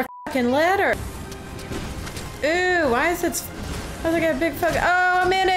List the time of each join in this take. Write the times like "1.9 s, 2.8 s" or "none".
0.9 s